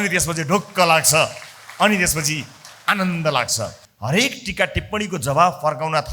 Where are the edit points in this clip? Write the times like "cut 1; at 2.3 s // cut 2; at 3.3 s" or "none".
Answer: cut 1; at 3.9 s